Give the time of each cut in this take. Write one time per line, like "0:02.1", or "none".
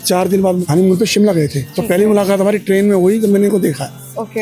none